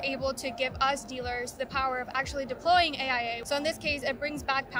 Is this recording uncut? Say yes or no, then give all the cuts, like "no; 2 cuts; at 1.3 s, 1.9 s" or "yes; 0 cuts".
no; 1 cut; at 3.4 s